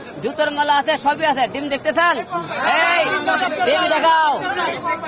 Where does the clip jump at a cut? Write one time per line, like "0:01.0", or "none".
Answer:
none